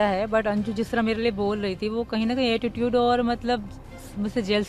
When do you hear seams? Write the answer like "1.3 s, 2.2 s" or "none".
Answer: none